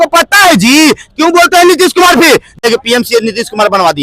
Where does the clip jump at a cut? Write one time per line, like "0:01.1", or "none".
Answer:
0:02.6